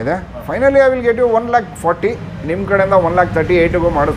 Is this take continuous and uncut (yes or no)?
yes